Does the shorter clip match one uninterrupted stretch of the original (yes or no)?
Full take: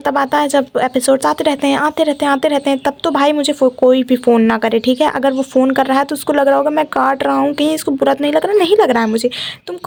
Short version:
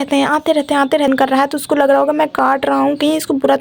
no